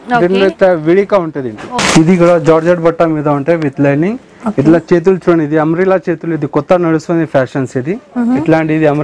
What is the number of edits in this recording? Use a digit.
1